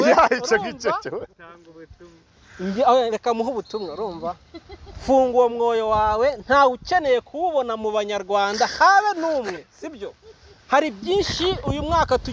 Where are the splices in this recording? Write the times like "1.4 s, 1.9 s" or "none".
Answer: none